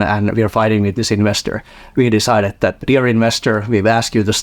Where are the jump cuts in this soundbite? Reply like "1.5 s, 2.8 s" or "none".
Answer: 2.8 s